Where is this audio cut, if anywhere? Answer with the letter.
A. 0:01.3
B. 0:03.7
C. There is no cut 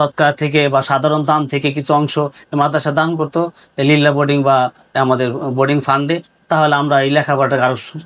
C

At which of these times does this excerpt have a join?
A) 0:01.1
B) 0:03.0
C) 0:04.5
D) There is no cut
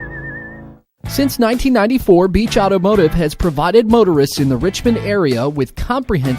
A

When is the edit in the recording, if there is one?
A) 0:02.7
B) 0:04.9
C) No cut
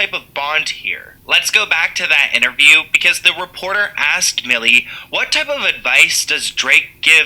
C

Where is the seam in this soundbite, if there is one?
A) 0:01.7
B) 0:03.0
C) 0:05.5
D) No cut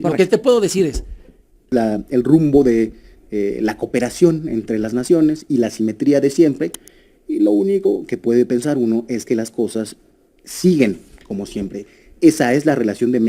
A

